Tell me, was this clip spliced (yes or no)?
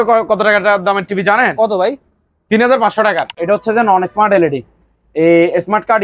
yes